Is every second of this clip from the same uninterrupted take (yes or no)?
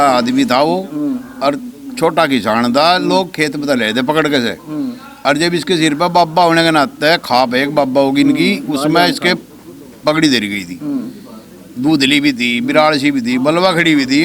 yes